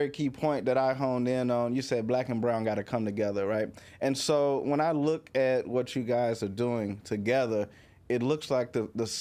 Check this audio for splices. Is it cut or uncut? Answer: uncut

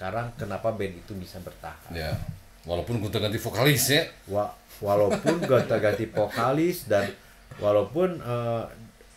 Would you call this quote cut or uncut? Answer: uncut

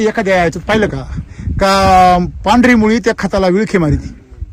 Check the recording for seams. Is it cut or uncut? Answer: uncut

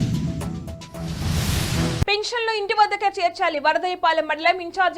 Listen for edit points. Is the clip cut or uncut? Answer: cut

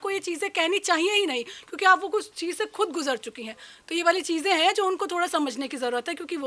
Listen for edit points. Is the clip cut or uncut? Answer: uncut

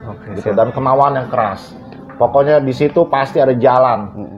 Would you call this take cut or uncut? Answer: uncut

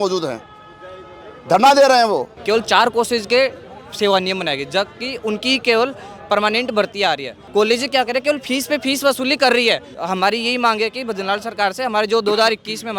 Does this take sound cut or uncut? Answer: cut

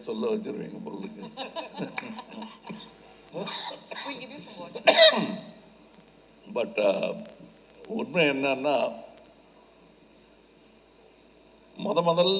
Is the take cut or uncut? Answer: uncut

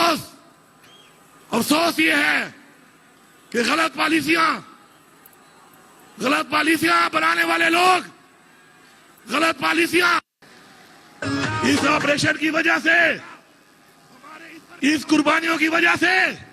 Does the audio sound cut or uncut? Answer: uncut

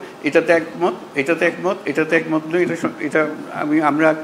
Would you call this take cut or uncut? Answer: uncut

